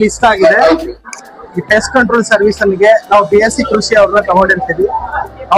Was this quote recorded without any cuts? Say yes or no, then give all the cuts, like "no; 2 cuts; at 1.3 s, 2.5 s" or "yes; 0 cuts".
no; 1 cut; at 1.0 s